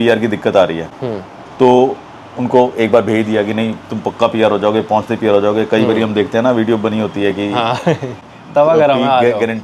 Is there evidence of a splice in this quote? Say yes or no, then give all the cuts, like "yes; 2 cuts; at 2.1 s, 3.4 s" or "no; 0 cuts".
no; 0 cuts